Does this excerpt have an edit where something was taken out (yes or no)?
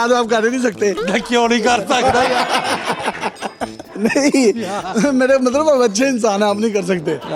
no